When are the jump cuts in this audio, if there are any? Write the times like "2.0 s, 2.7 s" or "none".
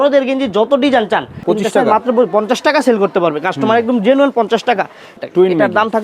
1.4 s, 5.1 s